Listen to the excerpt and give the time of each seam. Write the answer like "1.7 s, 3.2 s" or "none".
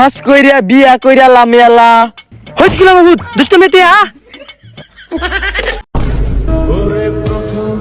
5.8 s